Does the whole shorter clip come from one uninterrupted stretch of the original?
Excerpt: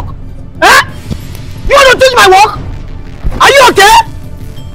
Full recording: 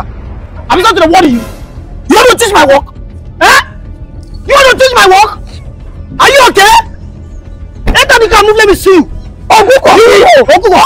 yes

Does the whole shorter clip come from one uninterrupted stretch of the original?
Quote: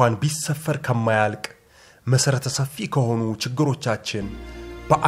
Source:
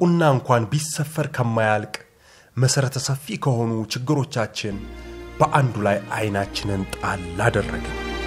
yes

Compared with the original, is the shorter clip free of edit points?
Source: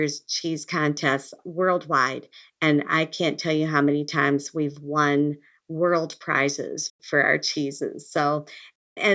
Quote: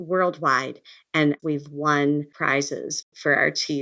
no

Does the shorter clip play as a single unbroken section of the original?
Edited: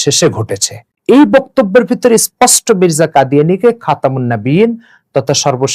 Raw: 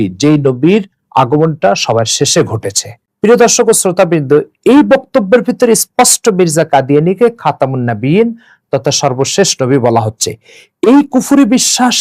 no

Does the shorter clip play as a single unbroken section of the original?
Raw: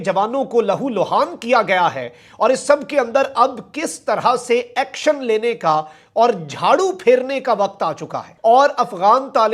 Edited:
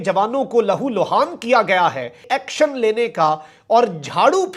no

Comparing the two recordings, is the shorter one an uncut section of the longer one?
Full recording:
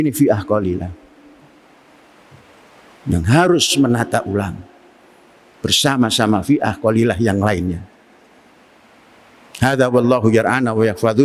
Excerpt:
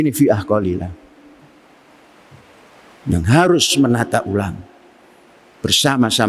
yes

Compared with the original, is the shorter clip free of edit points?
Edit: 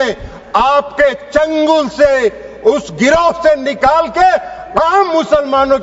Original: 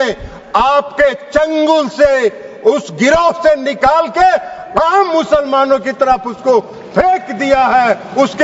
yes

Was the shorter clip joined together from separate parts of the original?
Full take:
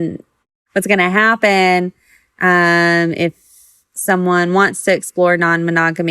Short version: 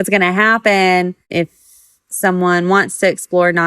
yes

